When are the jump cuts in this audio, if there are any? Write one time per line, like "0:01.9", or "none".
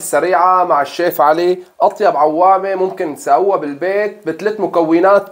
none